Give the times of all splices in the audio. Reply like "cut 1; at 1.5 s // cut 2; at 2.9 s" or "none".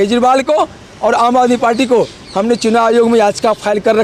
none